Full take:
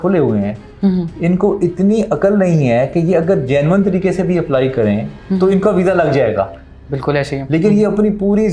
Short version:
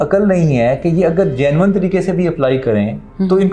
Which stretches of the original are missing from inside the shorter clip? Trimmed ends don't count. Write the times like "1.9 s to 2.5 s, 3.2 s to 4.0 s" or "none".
none